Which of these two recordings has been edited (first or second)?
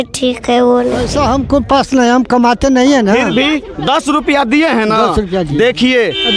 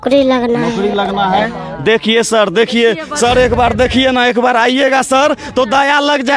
first